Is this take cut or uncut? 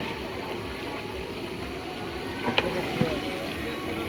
uncut